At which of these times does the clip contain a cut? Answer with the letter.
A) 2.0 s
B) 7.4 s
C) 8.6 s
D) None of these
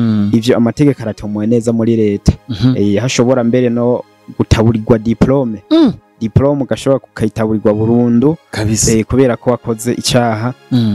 D